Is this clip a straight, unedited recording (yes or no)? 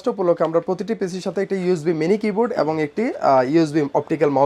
yes